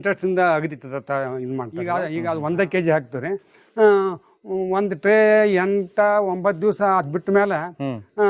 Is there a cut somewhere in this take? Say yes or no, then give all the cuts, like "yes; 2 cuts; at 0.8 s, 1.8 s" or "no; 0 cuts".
yes; 1 cut; at 1.8 s